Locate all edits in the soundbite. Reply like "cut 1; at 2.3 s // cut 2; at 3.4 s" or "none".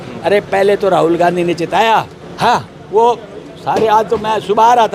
cut 1; at 2.2 s